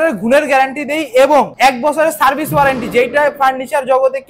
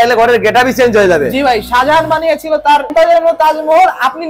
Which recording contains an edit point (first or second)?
second